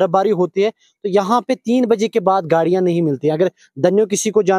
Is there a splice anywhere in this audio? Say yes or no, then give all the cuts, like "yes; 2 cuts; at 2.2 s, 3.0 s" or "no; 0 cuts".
no; 0 cuts